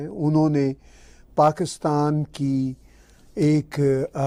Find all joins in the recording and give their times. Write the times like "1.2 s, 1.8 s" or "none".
none